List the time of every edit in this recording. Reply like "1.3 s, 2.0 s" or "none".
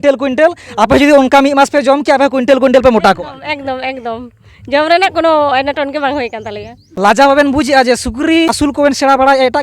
6.9 s, 8.6 s